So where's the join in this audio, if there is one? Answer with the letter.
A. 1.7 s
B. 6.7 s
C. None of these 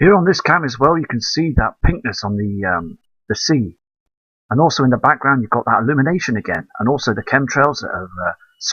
B